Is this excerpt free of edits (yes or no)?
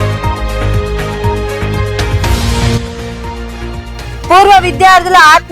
no